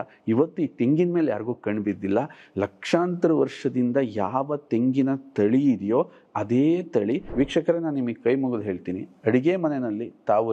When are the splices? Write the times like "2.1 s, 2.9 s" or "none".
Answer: 7.3 s

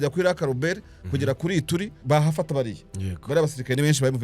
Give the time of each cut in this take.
2.0 s

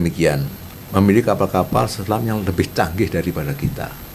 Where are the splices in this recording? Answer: none

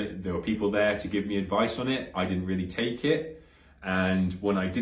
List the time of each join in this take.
none

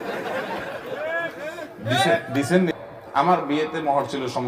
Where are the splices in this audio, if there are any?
2.7 s

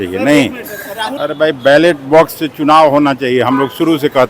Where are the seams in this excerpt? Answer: 1.1 s

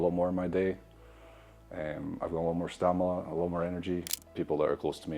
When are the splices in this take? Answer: 4.2 s

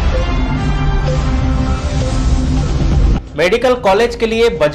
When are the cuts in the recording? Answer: none

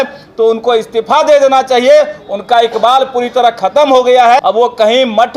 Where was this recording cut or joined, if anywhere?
4.4 s

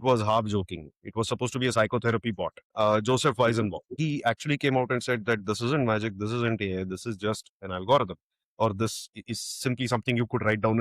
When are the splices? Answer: 2.6 s, 4.0 s

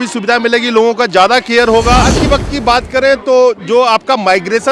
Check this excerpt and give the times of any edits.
2.2 s

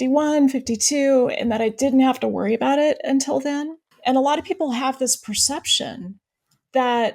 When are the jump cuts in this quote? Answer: 3.8 s

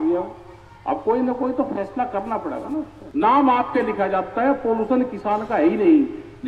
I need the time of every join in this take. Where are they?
3.0 s

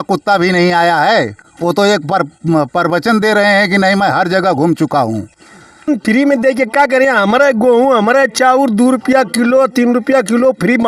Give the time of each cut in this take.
5.7 s

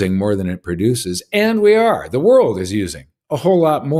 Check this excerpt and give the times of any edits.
none

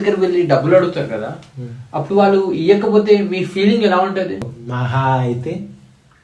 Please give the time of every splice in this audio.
4.5 s

